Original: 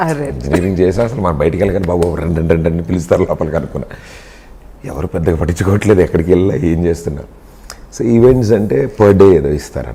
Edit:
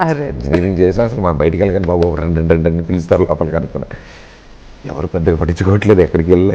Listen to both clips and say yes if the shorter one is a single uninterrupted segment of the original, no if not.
yes